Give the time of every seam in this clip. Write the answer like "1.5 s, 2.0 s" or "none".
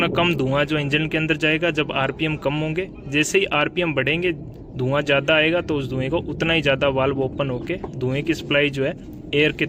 none